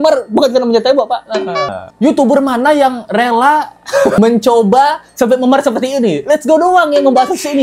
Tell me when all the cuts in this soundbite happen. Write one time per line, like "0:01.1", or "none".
0:01.8
0:04.2